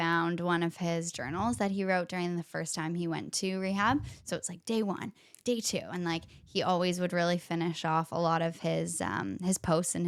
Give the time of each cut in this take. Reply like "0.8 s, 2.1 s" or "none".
none